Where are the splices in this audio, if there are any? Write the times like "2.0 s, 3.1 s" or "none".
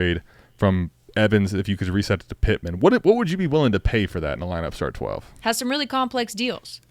none

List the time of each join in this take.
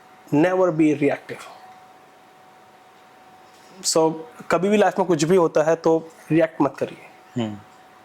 none

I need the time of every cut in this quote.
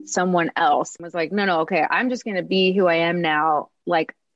0.9 s

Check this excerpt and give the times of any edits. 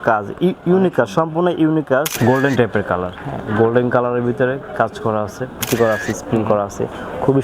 2.1 s, 5.6 s

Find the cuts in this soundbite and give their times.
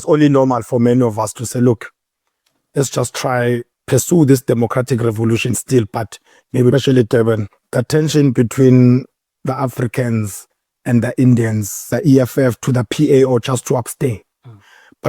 6.7 s, 11.9 s

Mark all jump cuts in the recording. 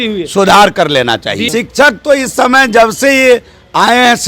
1.4 s

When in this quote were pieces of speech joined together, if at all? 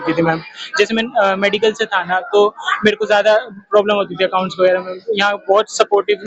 none

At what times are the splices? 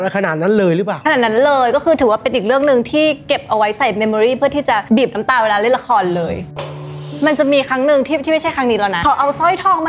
4.8 s, 7.0 s, 9.0 s

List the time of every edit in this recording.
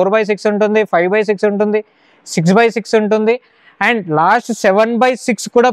none

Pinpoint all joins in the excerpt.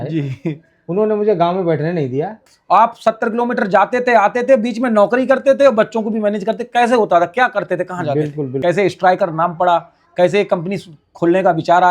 2.5 s, 8.5 s

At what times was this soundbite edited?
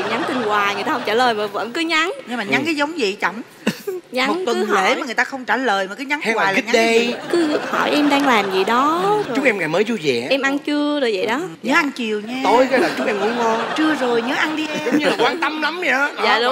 none

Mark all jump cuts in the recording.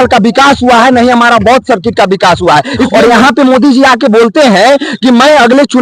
2.9 s

